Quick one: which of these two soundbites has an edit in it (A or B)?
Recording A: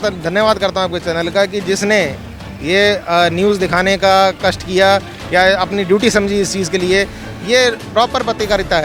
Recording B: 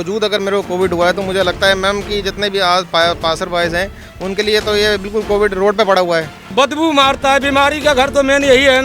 B